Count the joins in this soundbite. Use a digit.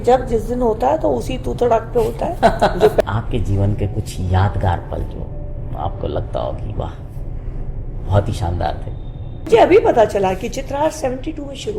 2